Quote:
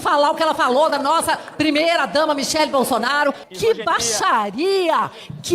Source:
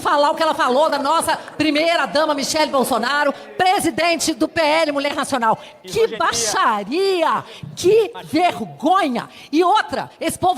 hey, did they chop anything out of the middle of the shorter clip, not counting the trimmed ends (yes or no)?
yes